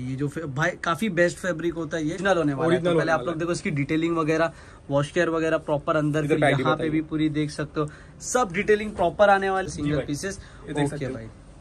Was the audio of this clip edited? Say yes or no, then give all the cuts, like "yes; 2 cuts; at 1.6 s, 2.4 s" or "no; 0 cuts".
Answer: yes; 2 cuts; at 2.2 s, 9.7 s